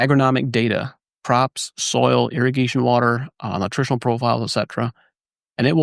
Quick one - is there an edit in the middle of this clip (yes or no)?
no